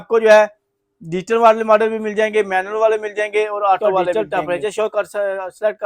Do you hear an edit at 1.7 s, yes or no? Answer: no